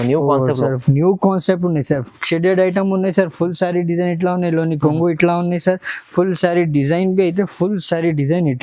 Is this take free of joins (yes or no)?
yes